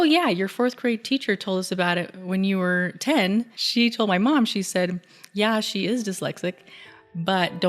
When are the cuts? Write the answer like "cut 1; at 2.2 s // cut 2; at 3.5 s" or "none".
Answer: cut 1; at 3.6 s

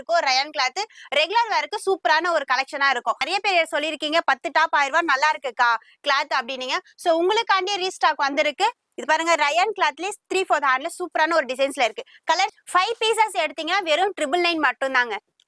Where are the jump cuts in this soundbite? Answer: cut 1; at 3.3 s // cut 2; at 12.6 s

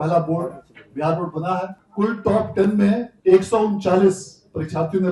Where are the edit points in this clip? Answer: cut 1; at 1.8 s // cut 2; at 3.1 s

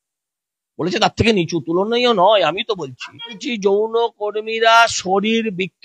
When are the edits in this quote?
cut 1; at 3.5 s

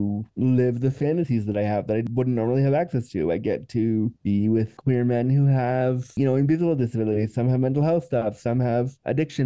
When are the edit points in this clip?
cut 1; at 2.0 s // cut 2; at 6.1 s

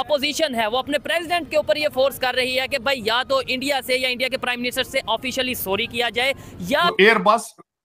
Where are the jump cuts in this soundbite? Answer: cut 1; at 6.9 s

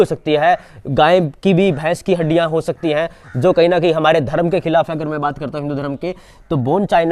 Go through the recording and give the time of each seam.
none

